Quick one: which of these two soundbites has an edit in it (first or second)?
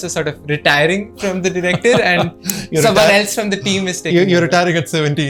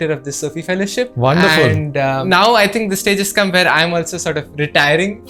second